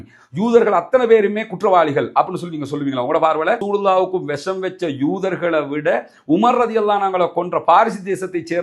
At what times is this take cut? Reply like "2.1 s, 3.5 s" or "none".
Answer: none